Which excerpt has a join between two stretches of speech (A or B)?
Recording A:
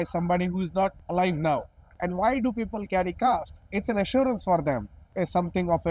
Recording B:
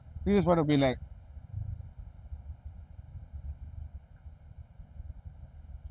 A